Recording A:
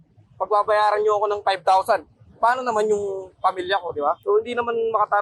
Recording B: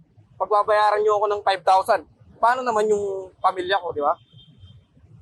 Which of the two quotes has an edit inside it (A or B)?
A